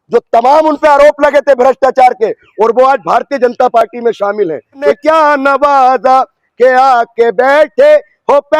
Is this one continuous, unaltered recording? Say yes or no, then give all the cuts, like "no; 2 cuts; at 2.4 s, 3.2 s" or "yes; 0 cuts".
no; 1 cut; at 4.9 s